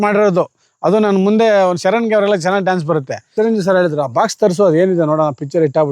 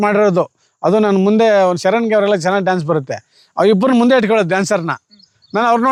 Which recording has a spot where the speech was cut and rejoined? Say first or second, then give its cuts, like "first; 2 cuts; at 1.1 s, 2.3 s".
first; 1 cut; at 3.2 s